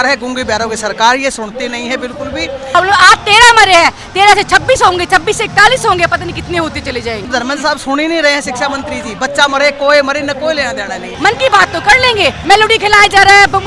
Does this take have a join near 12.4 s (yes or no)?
yes